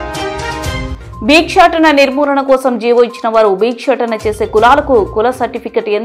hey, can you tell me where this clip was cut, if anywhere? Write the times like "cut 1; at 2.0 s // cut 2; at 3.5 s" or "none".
none